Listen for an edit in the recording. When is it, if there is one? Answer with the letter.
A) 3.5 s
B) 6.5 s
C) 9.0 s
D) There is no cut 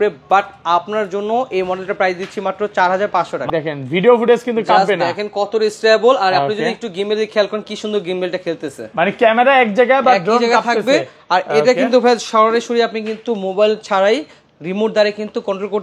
A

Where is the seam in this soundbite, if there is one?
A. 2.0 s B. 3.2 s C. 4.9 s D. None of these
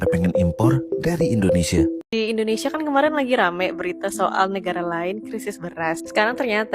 A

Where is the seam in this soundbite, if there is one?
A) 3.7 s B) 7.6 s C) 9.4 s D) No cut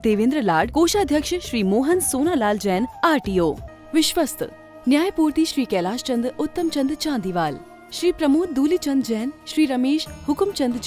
A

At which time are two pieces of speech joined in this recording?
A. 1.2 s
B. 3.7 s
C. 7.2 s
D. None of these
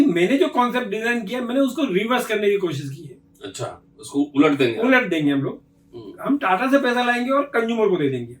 D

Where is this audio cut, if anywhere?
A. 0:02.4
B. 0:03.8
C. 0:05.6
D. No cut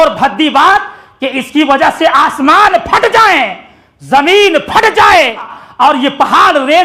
C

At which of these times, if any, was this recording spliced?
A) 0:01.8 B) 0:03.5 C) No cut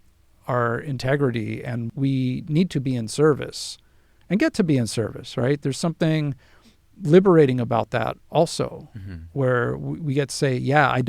A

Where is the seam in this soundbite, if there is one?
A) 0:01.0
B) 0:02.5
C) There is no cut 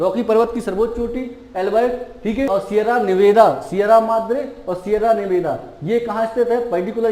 B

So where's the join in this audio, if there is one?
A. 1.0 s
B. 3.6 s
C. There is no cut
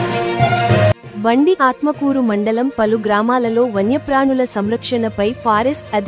A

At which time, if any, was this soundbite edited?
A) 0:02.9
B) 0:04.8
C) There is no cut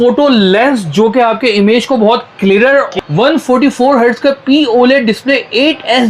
A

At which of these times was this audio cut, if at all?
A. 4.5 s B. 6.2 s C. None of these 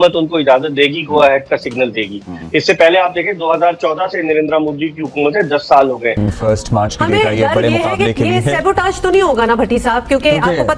B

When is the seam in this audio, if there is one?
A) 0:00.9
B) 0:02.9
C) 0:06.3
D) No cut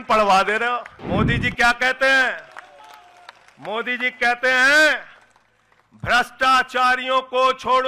A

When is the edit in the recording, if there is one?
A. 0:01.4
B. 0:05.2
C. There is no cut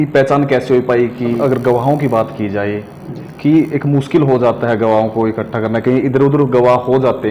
A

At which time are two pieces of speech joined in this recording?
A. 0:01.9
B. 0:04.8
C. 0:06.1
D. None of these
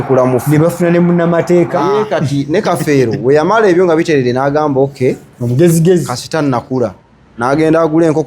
A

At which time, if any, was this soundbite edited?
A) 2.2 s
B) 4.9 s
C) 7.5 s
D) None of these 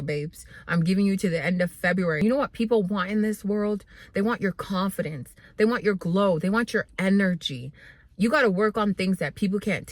A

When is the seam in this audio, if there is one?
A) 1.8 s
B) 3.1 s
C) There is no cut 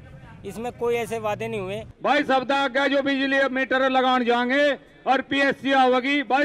A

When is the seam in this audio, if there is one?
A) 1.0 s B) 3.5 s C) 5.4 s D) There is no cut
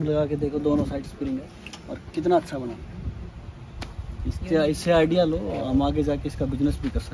D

